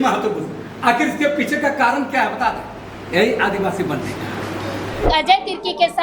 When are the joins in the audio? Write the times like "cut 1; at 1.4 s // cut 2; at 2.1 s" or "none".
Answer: cut 1; at 5.0 s